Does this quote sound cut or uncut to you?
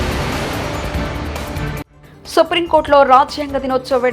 cut